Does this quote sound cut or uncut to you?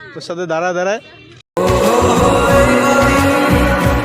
cut